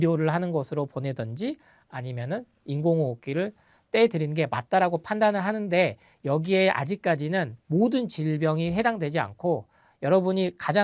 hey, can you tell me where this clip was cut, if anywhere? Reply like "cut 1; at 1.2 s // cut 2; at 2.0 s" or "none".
none